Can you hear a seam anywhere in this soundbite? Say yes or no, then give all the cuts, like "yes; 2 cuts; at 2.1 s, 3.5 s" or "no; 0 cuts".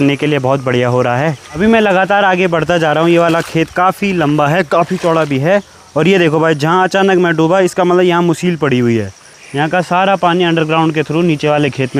no; 0 cuts